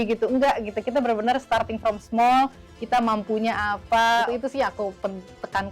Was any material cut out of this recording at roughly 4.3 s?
yes; 1 cut; at 4.3 s

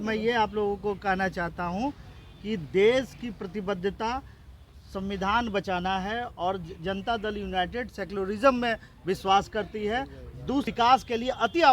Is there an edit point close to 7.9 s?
no; 1 cut; at 10.7 s

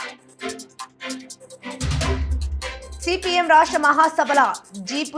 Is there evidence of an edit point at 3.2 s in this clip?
no; 1 cut; at 0.9 s

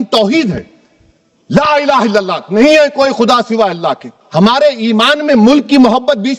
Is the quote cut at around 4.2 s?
yes; 1 cut; at 4.2 s

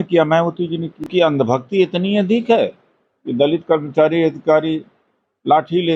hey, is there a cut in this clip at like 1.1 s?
yes; 1 cut; at 1.1 s

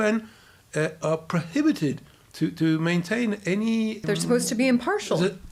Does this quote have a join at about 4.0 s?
yes; 1 cut; at 4.0 s

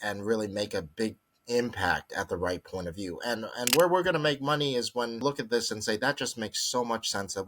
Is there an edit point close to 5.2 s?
yes; 1 cut; at 5.2 s

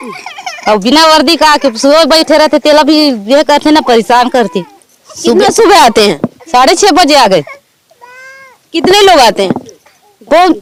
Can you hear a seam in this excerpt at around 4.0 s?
no; 0 cuts

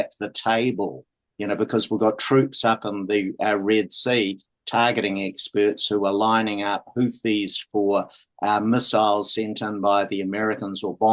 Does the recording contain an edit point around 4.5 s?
no; 0 cuts

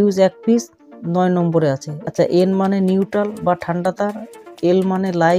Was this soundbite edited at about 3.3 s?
no; 1 cut; at 1.9 s

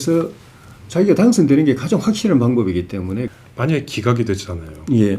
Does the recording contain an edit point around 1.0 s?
no; 1 cut; at 3.3 s

